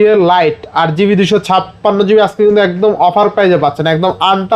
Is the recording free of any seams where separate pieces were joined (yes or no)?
yes